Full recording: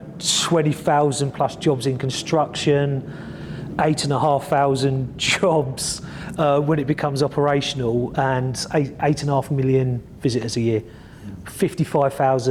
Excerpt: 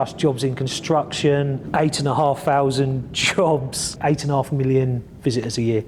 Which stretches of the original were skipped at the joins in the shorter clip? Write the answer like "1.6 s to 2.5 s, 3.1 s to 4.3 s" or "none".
3.0 s to 3.7 s, 6.0 s to 8.9 s